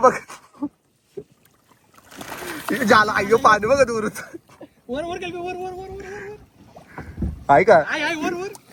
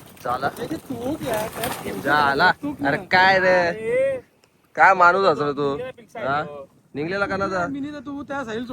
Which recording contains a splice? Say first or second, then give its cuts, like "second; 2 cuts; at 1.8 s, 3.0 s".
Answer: second; 1 cut; at 5.8 s